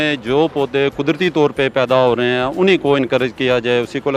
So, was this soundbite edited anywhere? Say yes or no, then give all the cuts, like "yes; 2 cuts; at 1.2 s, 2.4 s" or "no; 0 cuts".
no; 0 cuts